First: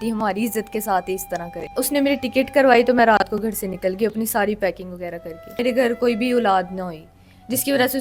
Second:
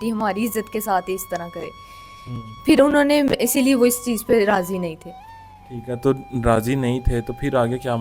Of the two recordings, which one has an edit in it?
first; 2 cuts; at 1.7 s, 5.6 s

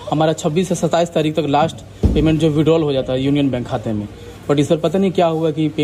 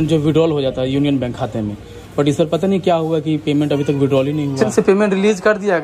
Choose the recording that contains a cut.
second; 1 cut; at 4.6 s

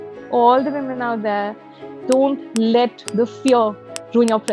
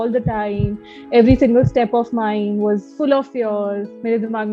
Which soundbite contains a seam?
first; 1 cut; at 3.0 s

